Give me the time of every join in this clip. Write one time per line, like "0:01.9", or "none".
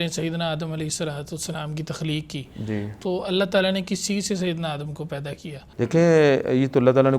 none